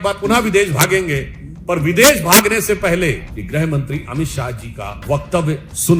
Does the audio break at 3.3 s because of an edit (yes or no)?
yes